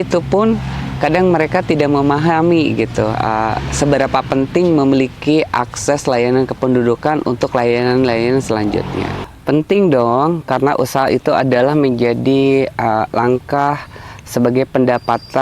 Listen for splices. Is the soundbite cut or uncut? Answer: cut